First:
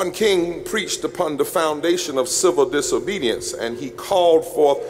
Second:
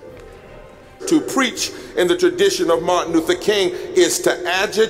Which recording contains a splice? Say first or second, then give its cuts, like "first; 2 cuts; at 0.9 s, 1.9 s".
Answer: second; 1 cut; at 1.0 s